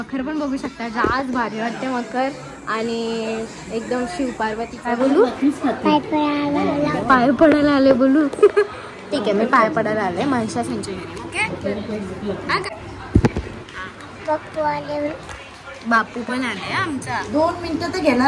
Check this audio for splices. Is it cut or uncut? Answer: cut